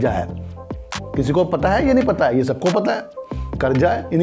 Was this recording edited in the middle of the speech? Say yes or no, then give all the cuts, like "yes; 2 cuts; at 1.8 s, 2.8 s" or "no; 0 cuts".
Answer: no; 0 cuts